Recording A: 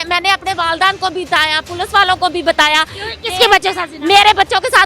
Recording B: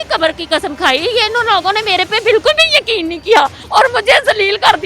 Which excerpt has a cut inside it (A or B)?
B